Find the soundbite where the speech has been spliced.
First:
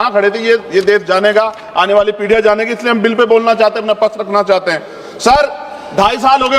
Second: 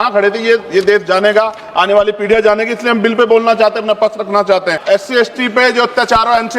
second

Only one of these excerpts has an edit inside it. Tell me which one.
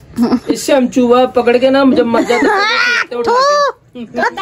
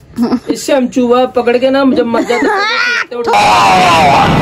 first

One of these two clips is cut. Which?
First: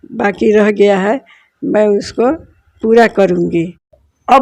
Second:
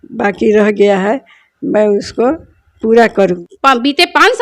second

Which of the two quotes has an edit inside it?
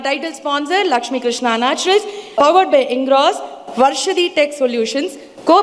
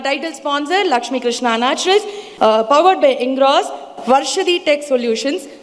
first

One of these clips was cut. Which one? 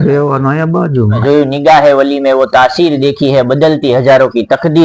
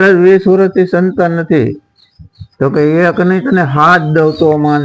first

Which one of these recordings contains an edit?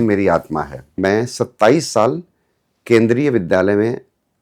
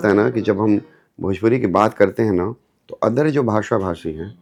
first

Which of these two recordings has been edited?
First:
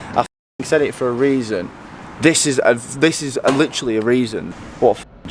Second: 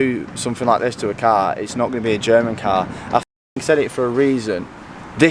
first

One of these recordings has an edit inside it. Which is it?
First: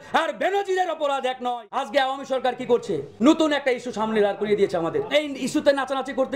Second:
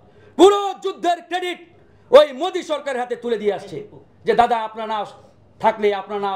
first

